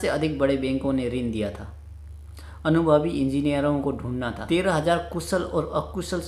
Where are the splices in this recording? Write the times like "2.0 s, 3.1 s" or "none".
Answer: 4.4 s

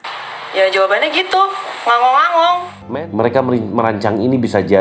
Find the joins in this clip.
2.8 s

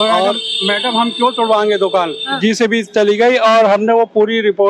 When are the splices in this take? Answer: 2.4 s

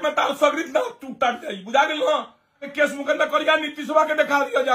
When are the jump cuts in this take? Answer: 2.7 s

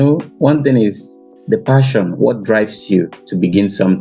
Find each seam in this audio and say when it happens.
none

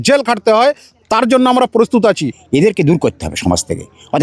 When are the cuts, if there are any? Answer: 2.3 s

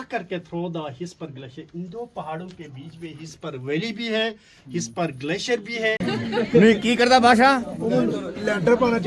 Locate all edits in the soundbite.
6.1 s

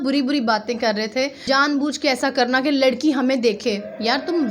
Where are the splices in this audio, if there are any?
1.4 s

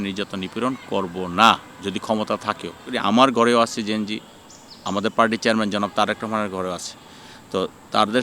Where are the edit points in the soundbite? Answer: 2.9 s

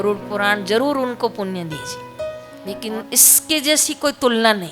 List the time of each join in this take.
2.5 s

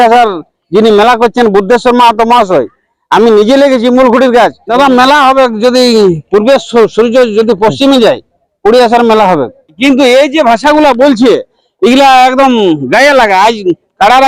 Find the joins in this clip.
4.6 s, 9.8 s

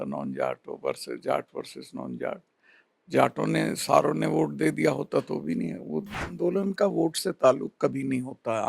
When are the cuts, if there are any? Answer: 6.2 s

